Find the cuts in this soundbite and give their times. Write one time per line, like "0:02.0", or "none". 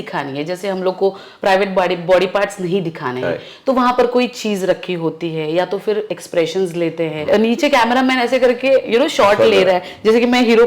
0:07.3